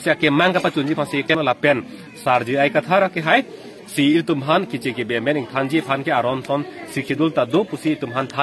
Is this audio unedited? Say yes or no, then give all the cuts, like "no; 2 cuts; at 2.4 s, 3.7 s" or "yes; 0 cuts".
no; 1 cut; at 1.3 s